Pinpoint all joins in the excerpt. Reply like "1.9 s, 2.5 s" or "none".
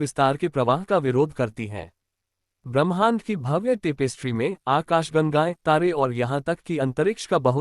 2.5 s